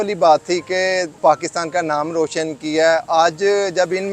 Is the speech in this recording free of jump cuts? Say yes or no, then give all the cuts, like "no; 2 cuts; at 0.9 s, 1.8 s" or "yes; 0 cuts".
no; 1 cut; at 1.1 s